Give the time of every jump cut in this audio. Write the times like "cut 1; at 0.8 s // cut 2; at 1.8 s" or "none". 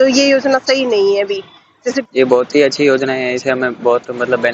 cut 1; at 2.0 s

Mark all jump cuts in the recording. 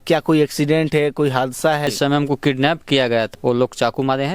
cut 1; at 1.9 s // cut 2; at 3.3 s

